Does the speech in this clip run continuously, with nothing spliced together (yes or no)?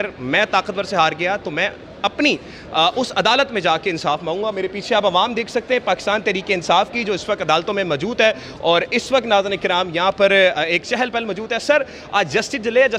yes